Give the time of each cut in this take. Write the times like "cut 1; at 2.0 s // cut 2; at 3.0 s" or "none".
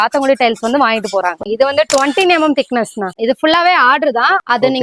cut 1; at 1.4 s // cut 2; at 3.1 s